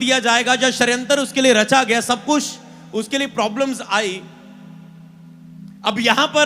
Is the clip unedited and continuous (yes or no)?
yes